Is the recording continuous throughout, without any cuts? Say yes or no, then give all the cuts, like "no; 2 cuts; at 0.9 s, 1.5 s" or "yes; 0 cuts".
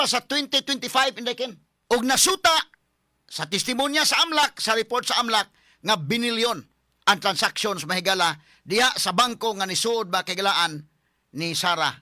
no; 1 cut; at 1.7 s